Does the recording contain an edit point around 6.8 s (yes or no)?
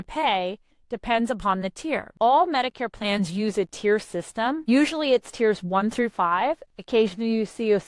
no